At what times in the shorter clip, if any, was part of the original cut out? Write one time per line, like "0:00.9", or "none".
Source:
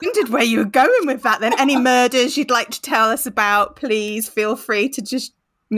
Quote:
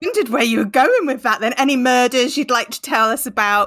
none